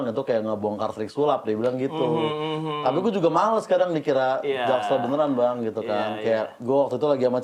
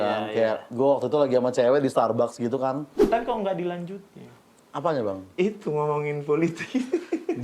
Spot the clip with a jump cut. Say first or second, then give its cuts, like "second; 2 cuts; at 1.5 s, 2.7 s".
second; 1 cut; at 2.9 s